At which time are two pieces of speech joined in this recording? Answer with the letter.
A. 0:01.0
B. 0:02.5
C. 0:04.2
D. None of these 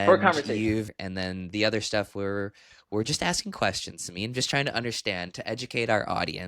A